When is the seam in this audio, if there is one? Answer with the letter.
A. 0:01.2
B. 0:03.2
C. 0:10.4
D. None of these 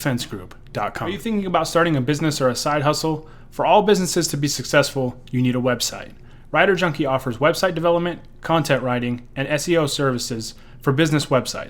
A